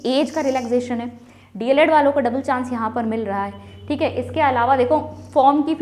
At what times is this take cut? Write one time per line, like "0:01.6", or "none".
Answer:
none